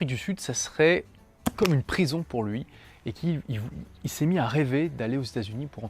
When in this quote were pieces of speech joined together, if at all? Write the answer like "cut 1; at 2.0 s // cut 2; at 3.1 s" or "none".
cut 1; at 4.5 s